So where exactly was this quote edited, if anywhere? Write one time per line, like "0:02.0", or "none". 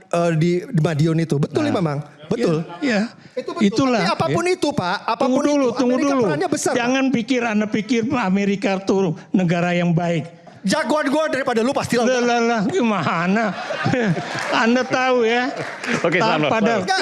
0:10.5